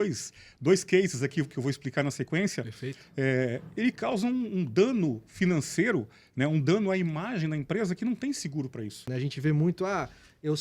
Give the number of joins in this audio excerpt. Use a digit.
1